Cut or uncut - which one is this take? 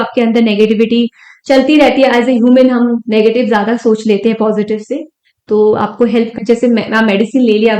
cut